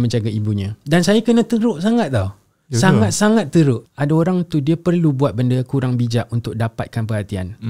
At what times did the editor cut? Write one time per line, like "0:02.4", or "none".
0:03.9